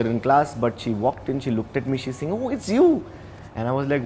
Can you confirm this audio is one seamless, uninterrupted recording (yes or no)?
yes